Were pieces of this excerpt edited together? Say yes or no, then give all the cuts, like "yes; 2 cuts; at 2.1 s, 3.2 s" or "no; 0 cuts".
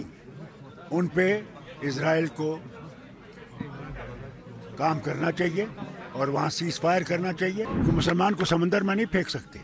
yes; 1 cut; at 7.7 s